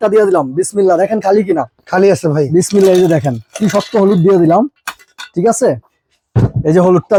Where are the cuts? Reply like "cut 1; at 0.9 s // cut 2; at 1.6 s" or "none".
none